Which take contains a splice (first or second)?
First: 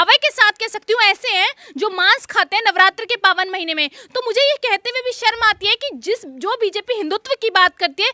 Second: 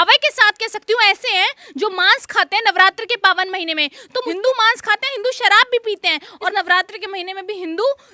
second